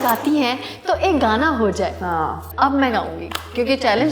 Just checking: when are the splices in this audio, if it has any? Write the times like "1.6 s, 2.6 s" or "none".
2.4 s